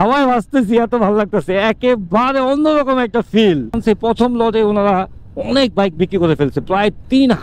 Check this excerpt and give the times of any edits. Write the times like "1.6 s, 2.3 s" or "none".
3.8 s